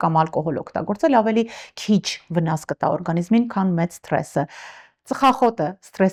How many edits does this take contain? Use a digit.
0